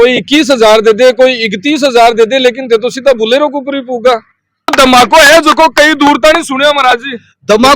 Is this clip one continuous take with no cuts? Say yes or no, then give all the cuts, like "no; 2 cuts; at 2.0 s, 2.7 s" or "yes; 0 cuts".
no; 1 cut; at 4.7 s